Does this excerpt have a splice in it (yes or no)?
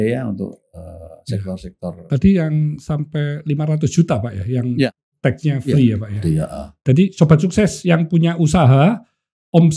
no